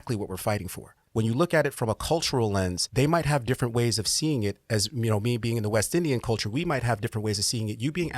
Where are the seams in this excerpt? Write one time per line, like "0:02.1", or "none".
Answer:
0:01.0
0:02.8